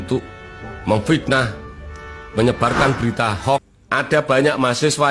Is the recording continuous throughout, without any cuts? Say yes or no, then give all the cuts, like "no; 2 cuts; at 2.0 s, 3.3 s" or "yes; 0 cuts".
no; 1 cut; at 3.8 s